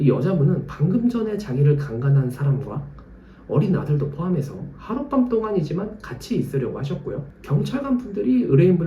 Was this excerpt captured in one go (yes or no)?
no